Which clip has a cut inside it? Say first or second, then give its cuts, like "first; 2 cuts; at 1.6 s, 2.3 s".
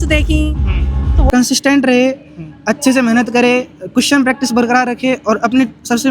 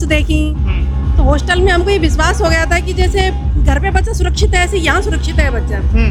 first; 1 cut; at 1.3 s